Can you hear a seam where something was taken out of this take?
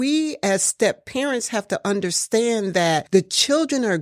no; 0 cuts

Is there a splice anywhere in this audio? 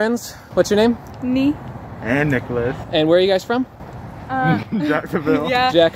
no; 0 cuts

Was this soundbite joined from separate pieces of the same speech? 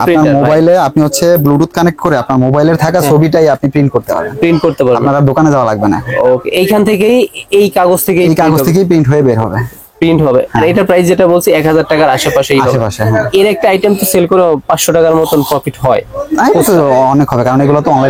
no; 0 cuts

